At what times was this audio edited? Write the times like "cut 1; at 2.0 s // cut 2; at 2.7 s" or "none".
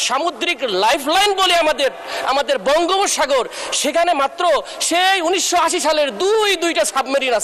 none